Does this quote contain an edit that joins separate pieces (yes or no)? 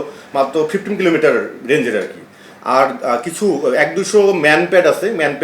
no